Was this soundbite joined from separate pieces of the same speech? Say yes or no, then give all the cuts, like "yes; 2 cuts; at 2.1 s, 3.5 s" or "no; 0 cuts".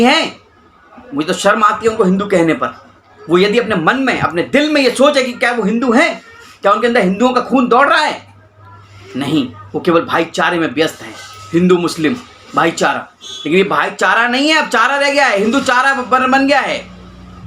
no; 0 cuts